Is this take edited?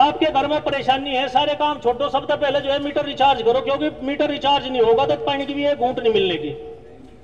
no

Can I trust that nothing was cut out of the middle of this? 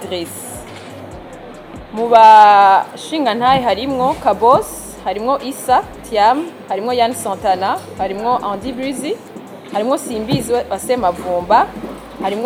yes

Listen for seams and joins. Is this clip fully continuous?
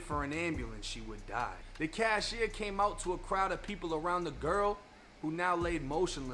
no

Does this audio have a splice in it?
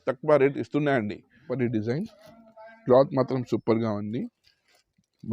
yes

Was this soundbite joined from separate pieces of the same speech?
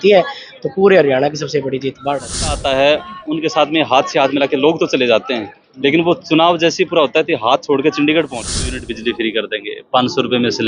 yes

